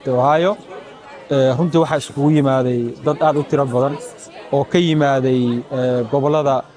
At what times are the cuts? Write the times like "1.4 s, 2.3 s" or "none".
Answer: none